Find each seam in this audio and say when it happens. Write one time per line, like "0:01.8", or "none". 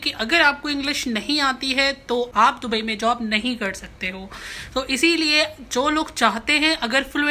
0:02.3